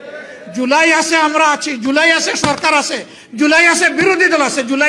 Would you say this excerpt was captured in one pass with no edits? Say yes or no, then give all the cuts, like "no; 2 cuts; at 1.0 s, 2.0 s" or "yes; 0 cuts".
yes; 0 cuts